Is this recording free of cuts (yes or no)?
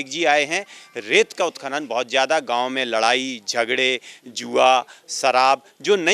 yes